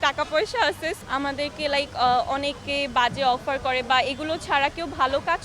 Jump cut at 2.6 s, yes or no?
no